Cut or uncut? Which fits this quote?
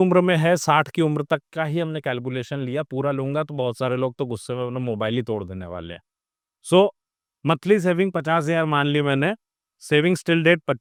uncut